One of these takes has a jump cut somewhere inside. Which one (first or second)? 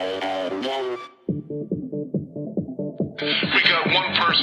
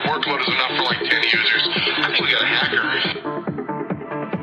first